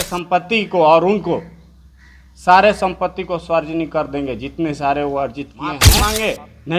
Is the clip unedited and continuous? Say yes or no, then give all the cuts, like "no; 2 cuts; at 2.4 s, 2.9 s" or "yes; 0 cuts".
no; 1 cut; at 5.8 s